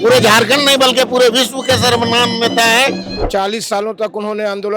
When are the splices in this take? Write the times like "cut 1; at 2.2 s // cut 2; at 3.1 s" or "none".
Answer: cut 1; at 3.1 s